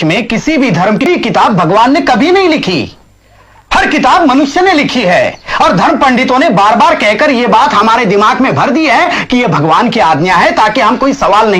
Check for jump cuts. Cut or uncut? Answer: cut